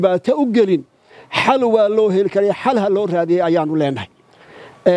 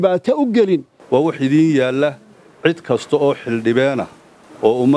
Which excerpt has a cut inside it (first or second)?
second